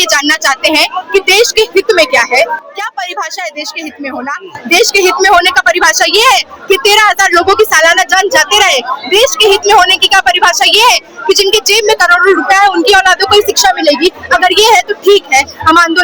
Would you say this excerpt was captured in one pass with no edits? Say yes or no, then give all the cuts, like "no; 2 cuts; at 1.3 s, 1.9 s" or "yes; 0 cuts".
yes; 0 cuts